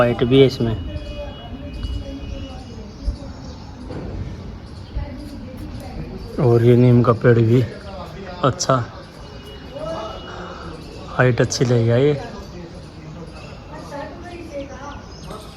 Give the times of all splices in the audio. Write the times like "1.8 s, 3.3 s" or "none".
none